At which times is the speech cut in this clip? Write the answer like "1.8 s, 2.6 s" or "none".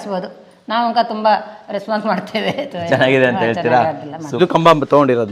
4.4 s